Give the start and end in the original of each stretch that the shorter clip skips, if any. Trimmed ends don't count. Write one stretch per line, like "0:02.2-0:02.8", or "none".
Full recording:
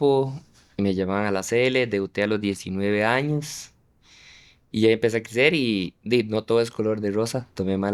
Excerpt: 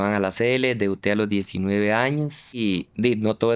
0:03.7-0:05.7